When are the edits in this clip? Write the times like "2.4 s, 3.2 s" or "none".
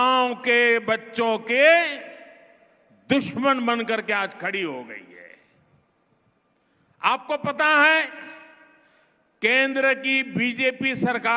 none

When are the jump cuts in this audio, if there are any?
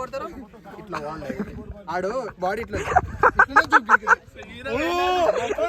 none

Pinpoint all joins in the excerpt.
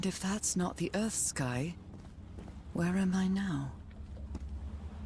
none

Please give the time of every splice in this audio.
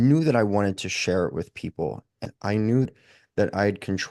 2.2 s, 2.9 s

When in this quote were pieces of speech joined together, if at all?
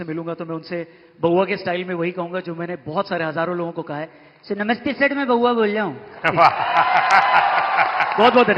none

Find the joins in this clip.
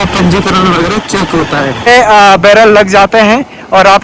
1.9 s

